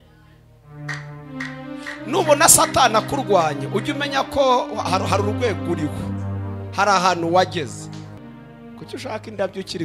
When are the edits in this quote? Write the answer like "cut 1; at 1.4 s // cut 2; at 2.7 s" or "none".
cut 1; at 8.1 s